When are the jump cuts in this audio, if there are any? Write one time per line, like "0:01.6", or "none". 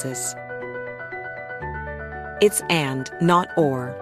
none